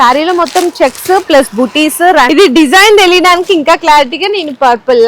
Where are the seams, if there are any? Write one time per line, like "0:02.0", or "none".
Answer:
0:02.3